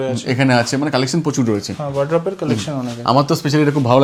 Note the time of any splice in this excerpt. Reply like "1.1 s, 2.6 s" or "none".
none